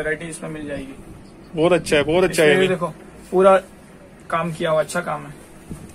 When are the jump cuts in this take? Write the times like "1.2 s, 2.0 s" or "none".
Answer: none